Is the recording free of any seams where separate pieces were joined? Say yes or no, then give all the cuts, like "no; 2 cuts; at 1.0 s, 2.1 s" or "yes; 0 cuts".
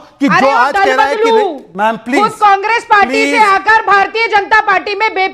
yes; 0 cuts